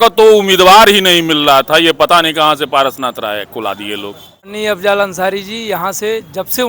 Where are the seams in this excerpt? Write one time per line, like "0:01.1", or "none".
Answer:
0:04.5